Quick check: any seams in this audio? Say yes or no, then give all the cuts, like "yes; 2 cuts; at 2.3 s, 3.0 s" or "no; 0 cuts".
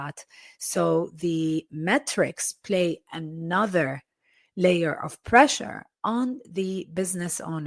no; 0 cuts